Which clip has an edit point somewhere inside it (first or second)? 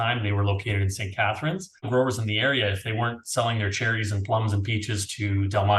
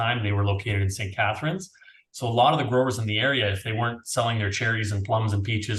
first